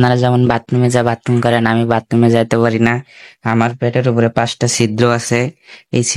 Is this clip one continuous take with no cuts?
yes; 0 cuts

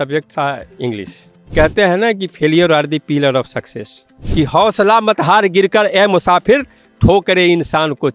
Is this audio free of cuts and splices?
no; 2 cuts; at 1.5 s, 4.2 s

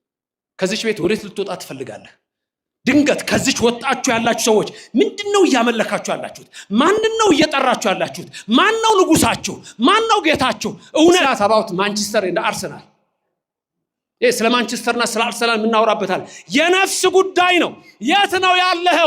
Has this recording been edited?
yes; 1 cut; at 11.2 s

